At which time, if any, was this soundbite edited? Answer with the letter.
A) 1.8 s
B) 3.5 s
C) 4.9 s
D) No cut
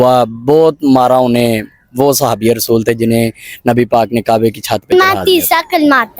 C